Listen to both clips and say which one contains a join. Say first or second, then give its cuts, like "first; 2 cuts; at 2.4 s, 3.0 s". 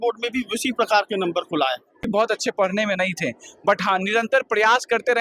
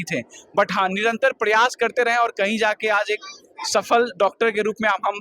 first; 1 cut; at 2.1 s